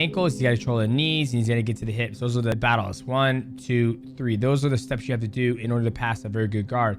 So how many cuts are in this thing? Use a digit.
1